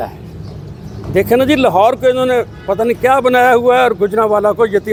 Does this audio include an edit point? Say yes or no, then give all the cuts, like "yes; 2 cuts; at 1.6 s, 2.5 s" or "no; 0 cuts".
no; 0 cuts